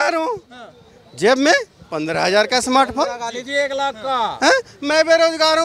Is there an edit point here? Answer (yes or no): no